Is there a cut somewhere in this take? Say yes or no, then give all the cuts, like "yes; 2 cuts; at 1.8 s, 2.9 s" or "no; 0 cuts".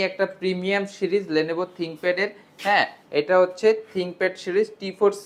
no; 0 cuts